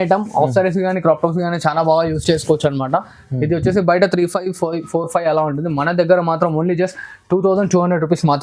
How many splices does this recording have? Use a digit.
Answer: 0